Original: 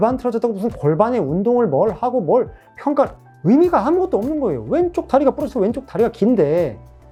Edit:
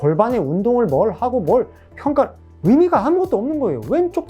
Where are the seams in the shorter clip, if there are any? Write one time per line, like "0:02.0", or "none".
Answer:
none